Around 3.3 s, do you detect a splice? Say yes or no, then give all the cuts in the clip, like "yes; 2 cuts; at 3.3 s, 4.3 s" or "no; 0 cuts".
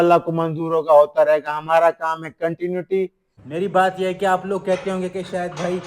yes; 1 cut; at 3.3 s